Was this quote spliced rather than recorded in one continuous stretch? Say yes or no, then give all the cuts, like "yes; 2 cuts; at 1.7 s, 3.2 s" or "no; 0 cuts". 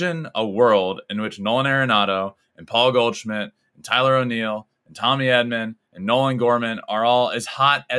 no; 0 cuts